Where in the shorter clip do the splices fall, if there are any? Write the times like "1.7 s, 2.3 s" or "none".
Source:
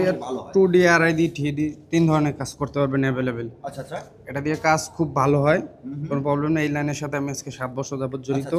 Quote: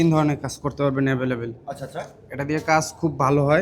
none